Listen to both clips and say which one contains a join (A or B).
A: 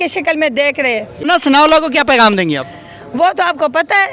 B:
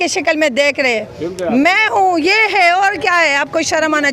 A